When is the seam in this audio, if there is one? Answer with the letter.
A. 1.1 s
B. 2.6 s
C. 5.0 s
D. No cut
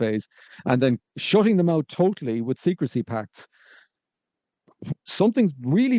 D